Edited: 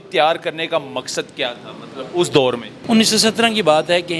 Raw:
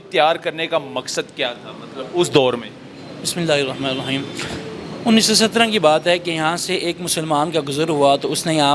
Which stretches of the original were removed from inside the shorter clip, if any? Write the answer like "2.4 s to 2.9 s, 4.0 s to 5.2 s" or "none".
2.7 s to 4.9 s